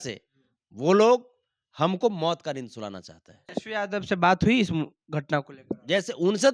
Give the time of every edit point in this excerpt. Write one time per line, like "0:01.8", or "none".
0:03.6